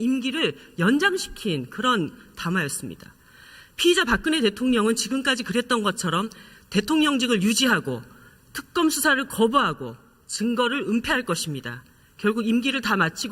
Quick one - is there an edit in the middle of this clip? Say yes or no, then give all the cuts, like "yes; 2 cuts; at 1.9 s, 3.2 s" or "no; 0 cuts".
yes; 1 cut; at 3.4 s